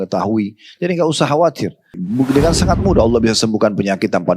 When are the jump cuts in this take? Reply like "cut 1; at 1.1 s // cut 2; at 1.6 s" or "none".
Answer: cut 1; at 2.0 s